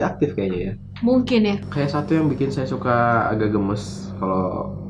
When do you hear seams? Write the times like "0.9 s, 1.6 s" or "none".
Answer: 1.6 s